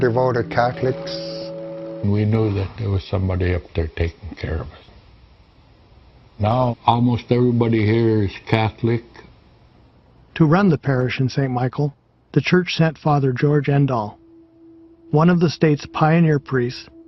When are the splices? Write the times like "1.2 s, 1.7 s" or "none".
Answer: none